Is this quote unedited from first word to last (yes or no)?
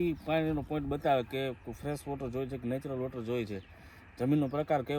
yes